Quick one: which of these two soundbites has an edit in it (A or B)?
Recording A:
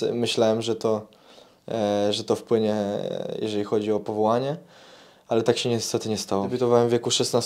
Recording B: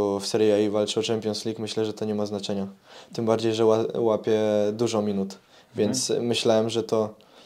A